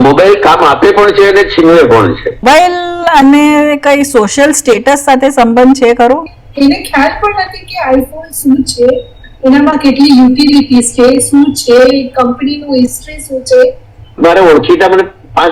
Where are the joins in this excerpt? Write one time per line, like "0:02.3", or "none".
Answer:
0:02.4
0:06.2
0:14.2